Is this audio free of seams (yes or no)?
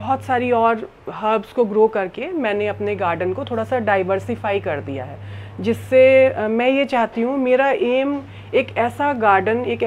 yes